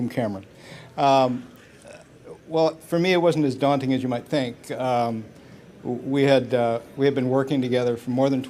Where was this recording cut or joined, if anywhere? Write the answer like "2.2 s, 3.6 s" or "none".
6.5 s